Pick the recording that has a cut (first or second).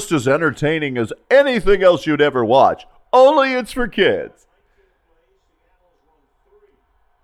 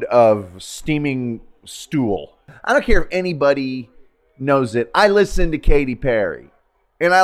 second